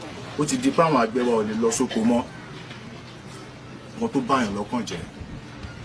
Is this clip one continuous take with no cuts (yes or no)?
no